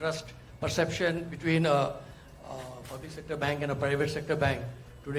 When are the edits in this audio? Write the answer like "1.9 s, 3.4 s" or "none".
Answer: none